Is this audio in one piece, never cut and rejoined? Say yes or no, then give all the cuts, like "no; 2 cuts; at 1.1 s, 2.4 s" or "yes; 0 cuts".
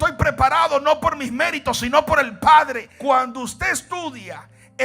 no; 1 cut; at 2.8 s